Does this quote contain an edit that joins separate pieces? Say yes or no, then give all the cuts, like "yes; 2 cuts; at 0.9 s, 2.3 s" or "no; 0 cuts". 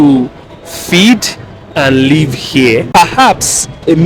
yes; 1 cut; at 2.9 s